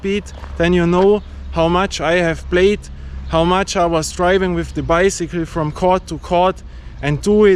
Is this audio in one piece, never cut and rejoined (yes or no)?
yes